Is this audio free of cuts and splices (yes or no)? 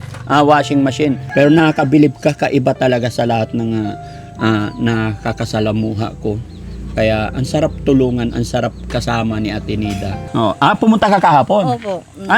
no